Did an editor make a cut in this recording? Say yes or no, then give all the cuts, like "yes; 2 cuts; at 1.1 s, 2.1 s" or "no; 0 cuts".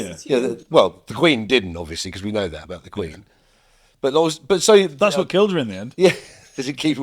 no; 0 cuts